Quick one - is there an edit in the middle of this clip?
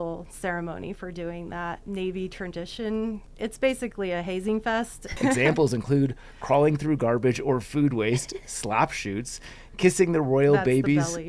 yes; 3 cuts; at 1.8 s, 3.3 s, 5.2 s

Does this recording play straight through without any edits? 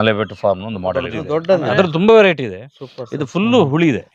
no; 1 cut; at 1.1 s

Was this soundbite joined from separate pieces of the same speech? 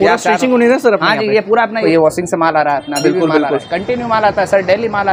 yes; 1 cut; at 1.8 s

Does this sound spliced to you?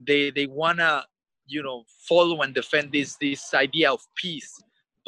no; 0 cuts

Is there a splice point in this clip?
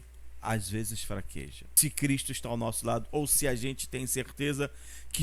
yes; 1 cut; at 1.6 s

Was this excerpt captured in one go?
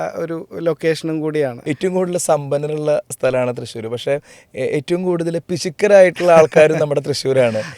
no; 1 cut; at 1.6 s

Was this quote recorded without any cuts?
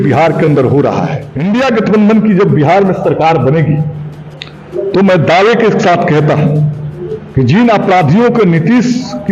no; 1 cut; at 1.2 s

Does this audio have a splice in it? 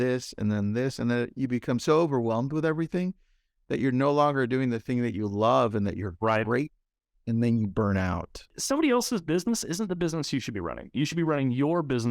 yes; 1 cut; at 8.5 s

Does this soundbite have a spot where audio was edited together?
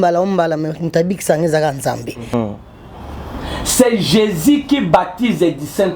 yes; 1 cut; at 2.3 s

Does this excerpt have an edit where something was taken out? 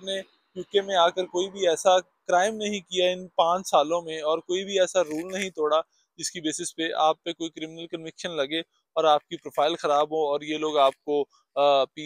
no; 0 cuts

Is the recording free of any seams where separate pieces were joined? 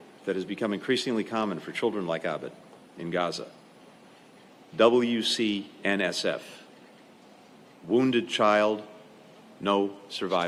yes; 0 cuts

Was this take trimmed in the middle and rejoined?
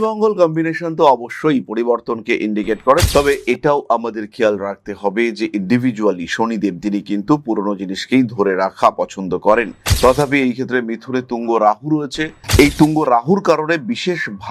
yes; 1 cut; at 9.8 s

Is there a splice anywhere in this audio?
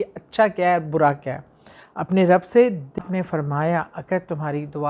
yes; 1 cut; at 3.0 s

